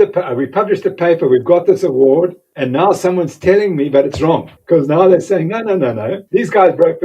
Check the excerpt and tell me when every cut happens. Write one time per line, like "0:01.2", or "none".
0:02.5
0:04.5
0:06.2